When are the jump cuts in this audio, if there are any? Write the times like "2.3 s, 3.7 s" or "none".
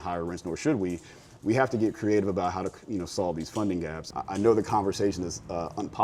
4.0 s